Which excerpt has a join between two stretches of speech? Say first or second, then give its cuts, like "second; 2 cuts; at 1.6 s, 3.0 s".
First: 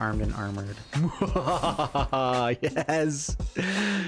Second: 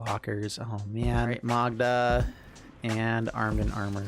second; 1 cut; at 1.4 s